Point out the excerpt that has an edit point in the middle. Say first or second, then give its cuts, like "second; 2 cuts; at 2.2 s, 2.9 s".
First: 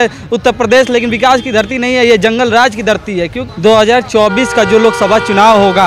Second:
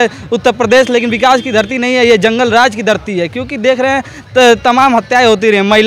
first; 1 cut; at 3.4 s